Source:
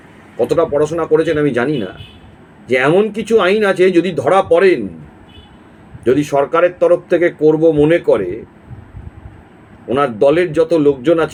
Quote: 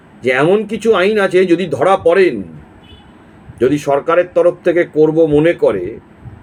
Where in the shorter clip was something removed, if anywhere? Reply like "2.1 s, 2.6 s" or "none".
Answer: none